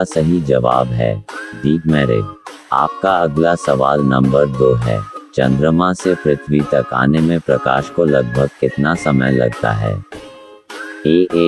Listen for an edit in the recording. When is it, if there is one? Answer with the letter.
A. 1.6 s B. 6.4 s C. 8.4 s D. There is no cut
A